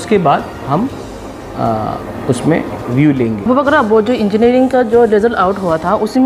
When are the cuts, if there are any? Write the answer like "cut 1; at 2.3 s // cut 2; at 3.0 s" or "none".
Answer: cut 1; at 3.5 s